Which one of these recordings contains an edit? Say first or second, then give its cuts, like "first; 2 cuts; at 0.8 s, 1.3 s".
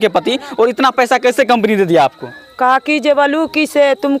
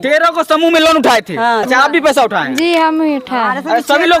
second; 1 cut; at 1.6 s